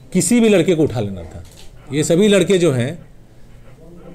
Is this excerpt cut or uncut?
uncut